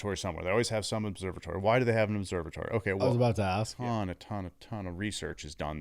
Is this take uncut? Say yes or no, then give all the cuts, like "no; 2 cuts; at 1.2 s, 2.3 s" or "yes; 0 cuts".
no; 1 cut; at 3.7 s